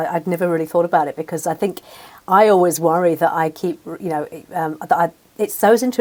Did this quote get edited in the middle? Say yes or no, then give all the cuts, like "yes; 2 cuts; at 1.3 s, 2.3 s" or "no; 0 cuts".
no; 0 cuts